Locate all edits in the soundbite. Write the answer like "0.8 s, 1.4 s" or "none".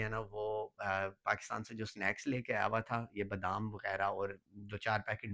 none